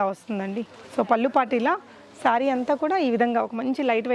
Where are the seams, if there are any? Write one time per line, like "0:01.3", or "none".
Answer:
none